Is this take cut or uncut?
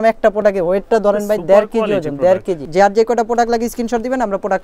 cut